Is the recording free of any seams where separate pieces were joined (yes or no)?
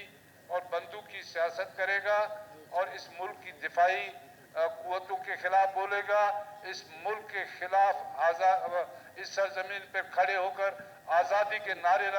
yes